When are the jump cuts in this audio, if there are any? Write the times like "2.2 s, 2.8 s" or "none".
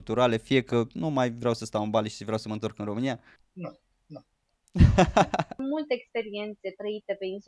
3.4 s, 5.5 s